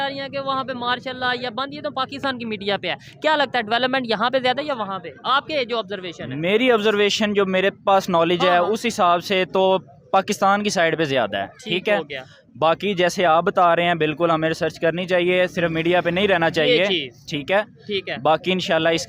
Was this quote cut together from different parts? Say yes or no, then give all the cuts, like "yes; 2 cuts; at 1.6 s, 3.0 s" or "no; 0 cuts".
no; 0 cuts